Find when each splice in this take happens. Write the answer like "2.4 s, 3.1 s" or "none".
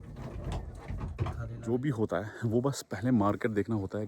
1.5 s